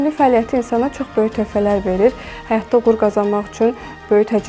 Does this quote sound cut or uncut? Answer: uncut